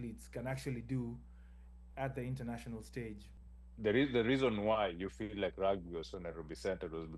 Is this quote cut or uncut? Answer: cut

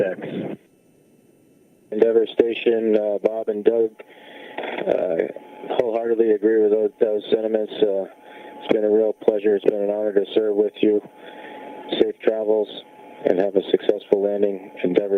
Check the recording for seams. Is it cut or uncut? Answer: uncut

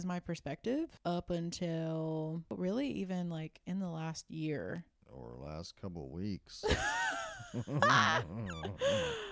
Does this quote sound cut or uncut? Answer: cut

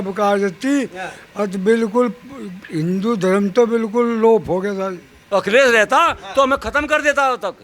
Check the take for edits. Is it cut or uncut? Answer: cut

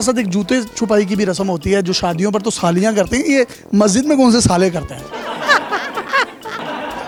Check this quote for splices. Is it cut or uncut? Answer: uncut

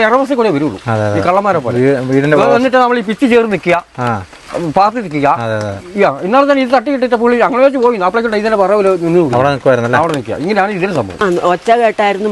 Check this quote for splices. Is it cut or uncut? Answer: cut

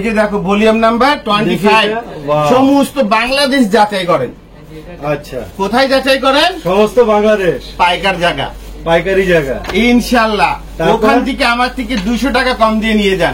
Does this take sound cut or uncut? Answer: uncut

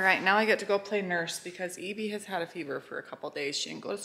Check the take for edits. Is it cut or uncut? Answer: uncut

